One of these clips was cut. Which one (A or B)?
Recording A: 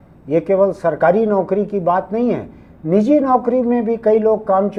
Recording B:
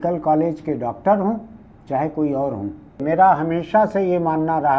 B